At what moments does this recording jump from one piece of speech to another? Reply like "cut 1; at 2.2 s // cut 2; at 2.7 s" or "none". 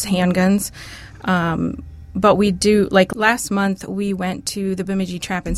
cut 1; at 3.1 s